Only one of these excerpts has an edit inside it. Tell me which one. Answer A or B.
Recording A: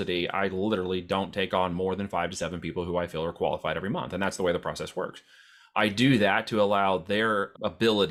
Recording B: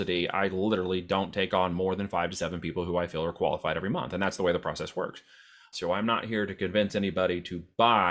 B